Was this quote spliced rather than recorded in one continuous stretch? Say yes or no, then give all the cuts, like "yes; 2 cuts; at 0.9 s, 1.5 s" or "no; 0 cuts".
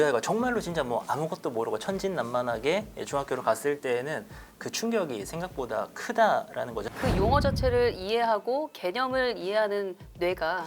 yes; 1 cut; at 6.8 s